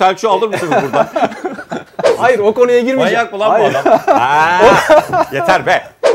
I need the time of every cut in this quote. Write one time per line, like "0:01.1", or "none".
0:02.1